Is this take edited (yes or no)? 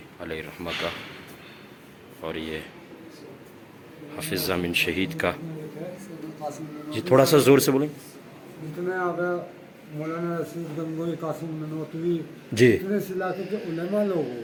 no